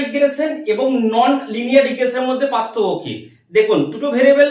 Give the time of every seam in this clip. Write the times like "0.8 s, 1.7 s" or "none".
none

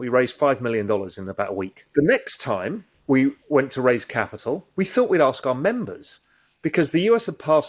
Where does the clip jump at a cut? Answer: 1.8 s, 2.9 s, 4.7 s

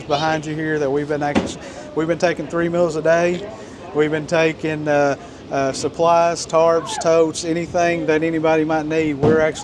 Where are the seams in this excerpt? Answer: none

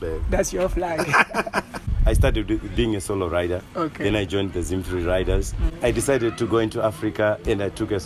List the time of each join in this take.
1.9 s, 5.6 s

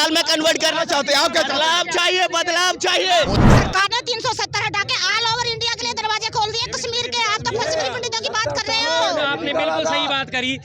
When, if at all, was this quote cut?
3.4 s

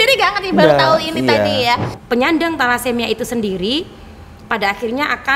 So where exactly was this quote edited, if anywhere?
1.9 s

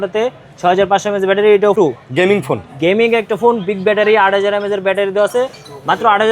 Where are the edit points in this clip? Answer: 1.8 s

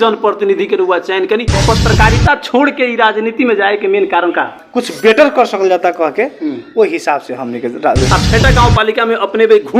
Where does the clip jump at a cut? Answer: 1.6 s, 4.6 s, 8.0 s

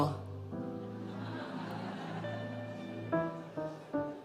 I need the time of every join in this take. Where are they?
none

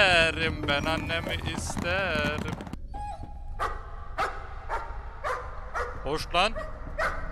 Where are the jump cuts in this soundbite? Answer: 2.7 s

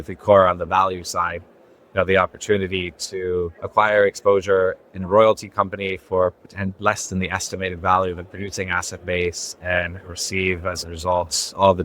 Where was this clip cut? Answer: 3.6 s

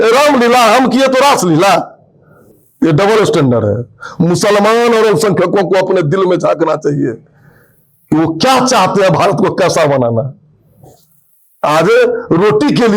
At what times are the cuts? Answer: none

